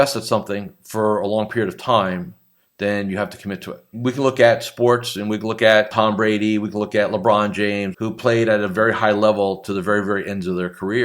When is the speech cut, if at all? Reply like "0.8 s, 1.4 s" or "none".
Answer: 3.9 s, 5.9 s, 7.9 s